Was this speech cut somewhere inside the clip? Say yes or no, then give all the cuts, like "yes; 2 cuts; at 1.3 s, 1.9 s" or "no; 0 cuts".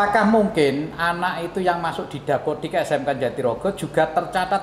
no; 0 cuts